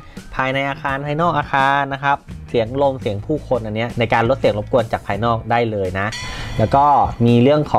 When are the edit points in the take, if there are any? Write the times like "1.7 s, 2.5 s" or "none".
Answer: 3.9 s, 6.3 s